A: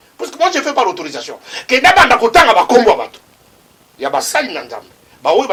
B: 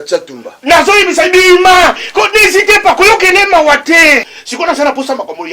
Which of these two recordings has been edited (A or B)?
B